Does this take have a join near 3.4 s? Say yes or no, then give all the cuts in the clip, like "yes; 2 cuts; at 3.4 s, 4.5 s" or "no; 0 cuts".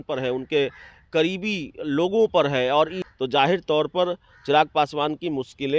yes; 1 cut; at 3.4 s